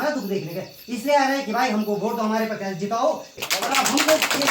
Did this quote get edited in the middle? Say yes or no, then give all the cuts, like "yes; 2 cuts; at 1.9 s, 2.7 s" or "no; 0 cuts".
yes; 1 cut; at 3.4 s